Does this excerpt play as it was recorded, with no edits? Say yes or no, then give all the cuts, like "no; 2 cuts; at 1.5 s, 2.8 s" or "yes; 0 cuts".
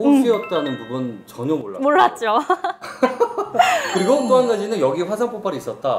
yes; 0 cuts